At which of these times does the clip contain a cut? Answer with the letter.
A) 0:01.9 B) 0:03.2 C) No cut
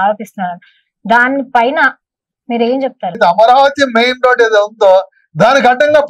B